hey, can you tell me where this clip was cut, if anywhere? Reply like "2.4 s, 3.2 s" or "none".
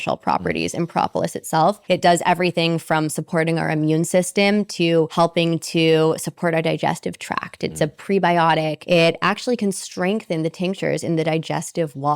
1.8 s, 5.1 s, 8.8 s

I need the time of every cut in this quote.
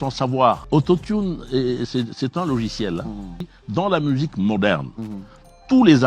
3.6 s

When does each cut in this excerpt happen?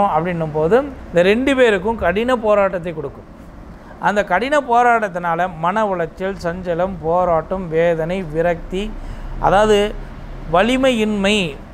1.0 s

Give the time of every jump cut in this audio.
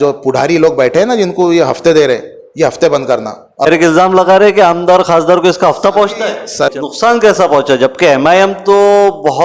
3.7 s, 6.7 s

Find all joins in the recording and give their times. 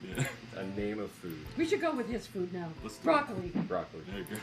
1.9 s, 3.7 s

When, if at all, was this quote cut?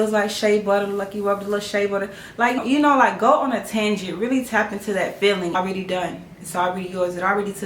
2.6 s, 5.6 s

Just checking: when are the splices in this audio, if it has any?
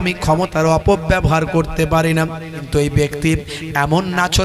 2.7 s

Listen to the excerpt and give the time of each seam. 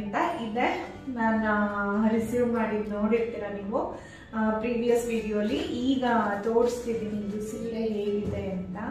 none

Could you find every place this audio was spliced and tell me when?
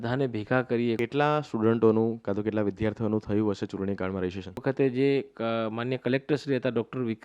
1.0 s, 4.6 s

